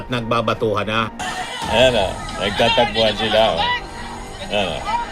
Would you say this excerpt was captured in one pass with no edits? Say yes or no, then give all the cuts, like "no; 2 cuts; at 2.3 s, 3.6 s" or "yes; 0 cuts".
no; 1 cut; at 1.2 s